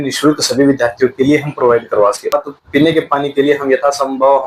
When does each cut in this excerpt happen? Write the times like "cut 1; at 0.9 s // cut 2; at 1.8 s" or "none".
cut 1; at 2.3 s